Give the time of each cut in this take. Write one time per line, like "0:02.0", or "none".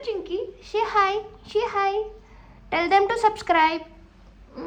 none